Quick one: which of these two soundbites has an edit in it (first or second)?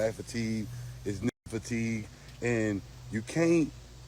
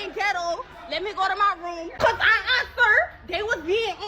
second